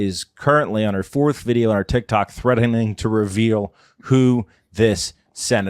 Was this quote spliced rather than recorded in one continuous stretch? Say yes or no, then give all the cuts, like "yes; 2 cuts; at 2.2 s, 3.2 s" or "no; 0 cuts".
no; 0 cuts